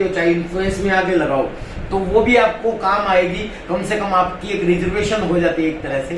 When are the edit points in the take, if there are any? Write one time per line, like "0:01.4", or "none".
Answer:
none